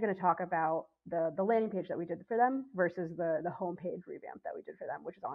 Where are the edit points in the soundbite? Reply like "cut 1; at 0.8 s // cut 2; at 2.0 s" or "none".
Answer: none